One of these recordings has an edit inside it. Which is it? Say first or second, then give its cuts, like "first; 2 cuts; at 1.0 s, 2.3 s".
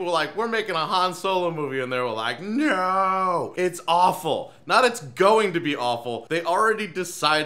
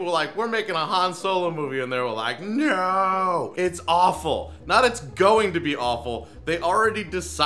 first; 1 cut; at 6.2 s